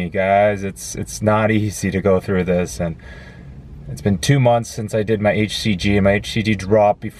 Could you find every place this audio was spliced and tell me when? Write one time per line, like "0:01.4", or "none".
none